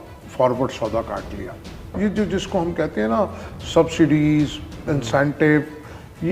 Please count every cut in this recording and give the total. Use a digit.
1